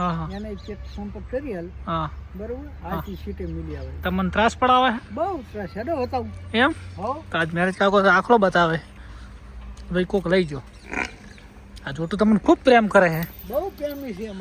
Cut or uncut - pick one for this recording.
uncut